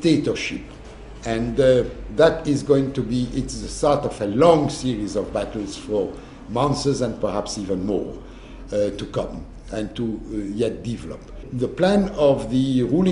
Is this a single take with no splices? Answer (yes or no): no